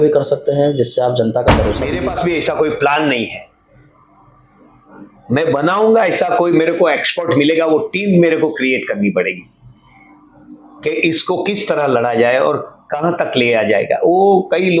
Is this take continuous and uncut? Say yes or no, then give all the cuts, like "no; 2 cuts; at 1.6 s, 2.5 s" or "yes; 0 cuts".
no; 1 cut; at 1.9 s